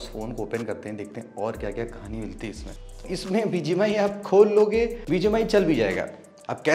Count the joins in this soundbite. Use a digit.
2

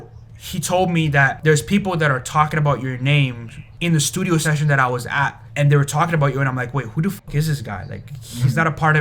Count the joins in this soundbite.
3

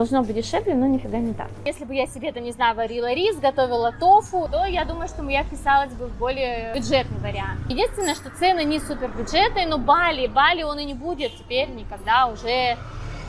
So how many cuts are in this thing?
4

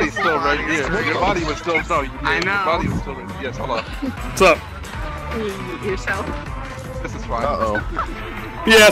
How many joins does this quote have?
1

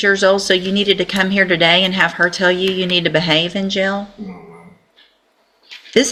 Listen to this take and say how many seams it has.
0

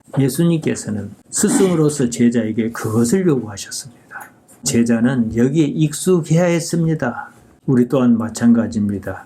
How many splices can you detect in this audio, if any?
1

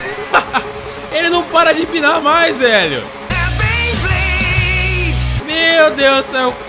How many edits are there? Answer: 1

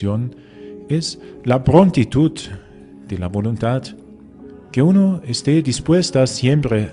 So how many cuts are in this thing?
1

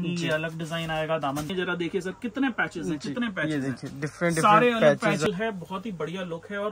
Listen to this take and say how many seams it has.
2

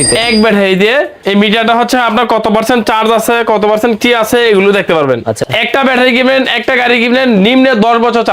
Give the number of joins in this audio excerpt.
2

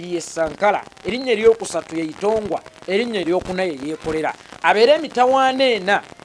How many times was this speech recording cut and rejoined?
0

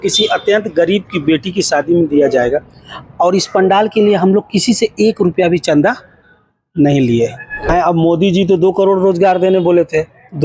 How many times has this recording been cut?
1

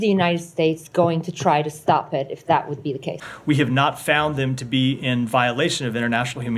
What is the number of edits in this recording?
1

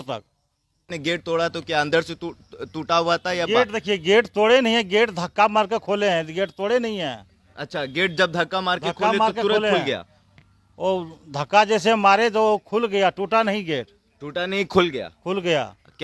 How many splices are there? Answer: 1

